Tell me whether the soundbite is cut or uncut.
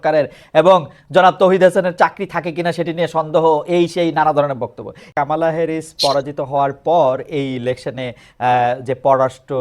cut